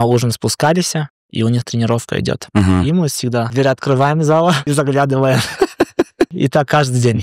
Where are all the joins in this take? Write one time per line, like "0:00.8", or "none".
0:03.5
0:04.6
0:06.3